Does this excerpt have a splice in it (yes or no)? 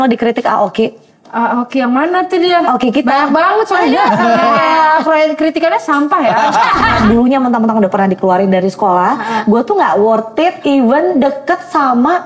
yes